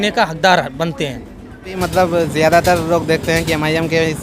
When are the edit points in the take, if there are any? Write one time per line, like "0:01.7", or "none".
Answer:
0:01.7